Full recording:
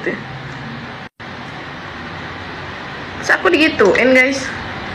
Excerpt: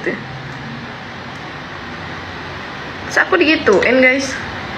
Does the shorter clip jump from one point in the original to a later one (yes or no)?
yes